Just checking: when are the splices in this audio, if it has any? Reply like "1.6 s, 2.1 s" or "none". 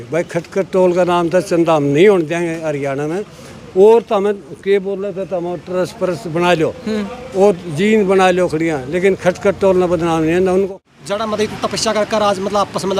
10.7 s